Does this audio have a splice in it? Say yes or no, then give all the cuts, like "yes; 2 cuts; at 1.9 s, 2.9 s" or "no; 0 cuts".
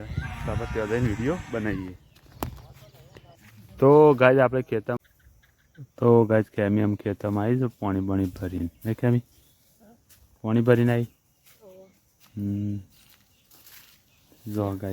yes; 1 cut; at 4.9 s